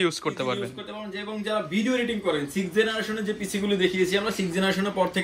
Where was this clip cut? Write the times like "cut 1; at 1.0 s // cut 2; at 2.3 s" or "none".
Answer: none